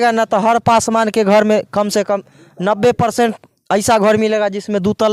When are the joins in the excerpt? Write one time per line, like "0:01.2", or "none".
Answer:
none